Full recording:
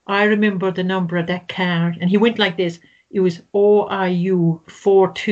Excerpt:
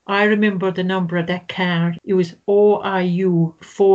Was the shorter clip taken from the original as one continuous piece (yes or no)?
no